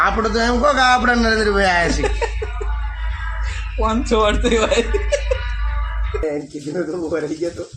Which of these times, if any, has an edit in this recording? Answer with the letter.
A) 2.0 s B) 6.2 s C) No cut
B